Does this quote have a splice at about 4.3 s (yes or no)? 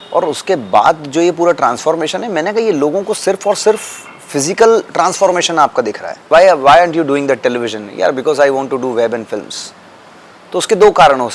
no